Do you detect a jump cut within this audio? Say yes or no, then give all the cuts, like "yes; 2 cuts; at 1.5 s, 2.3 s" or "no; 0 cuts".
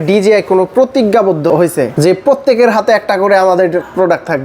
yes; 1 cut; at 1.5 s